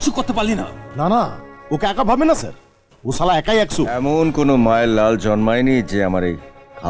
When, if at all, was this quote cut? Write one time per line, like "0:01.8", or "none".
0:03.9